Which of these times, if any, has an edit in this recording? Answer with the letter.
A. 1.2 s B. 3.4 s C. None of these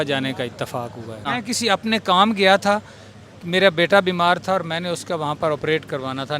A